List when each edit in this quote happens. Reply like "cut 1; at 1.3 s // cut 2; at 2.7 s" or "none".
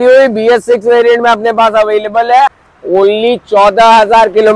cut 1; at 2.7 s